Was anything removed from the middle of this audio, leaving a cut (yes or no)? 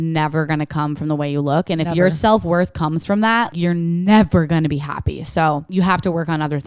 yes